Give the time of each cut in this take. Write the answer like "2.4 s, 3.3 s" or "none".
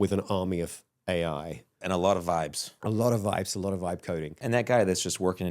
1.8 s, 2.7 s, 4.4 s